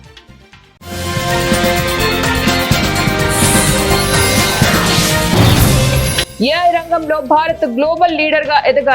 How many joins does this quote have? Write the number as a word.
one